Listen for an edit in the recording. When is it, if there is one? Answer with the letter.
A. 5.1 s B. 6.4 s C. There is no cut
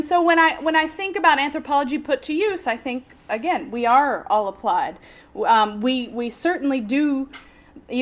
A